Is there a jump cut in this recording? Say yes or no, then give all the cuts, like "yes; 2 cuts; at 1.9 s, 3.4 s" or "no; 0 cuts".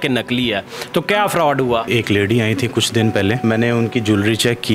yes; 2 cuts; at 1.9 s, 3.4 s